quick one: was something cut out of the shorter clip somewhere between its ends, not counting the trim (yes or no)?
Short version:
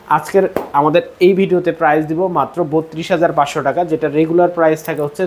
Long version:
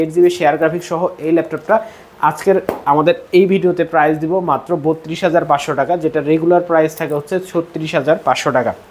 no